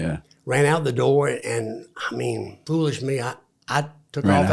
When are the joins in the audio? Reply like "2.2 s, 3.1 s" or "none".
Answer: 2.6 s